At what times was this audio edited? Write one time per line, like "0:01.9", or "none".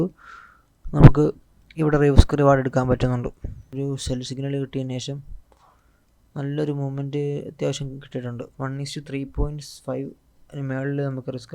0:03.7